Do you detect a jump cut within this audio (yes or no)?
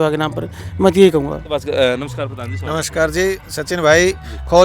no